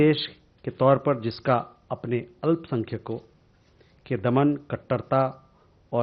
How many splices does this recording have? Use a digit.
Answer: 0